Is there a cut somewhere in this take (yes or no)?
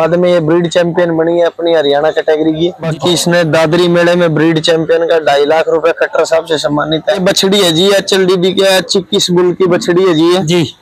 yes